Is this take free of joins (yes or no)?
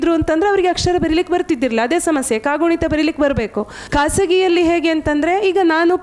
no